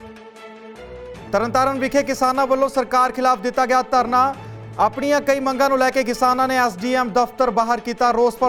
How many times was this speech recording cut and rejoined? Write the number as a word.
one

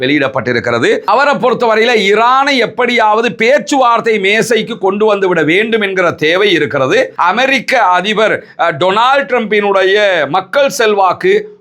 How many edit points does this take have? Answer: two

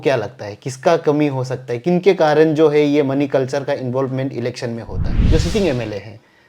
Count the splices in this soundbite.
one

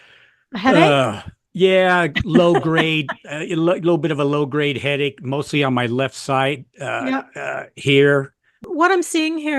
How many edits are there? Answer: one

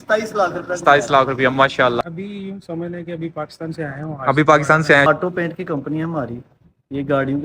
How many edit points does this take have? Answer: two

